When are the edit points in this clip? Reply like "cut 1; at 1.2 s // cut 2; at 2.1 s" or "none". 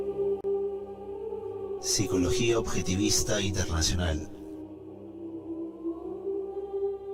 none